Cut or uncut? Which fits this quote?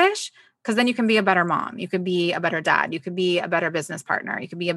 uncut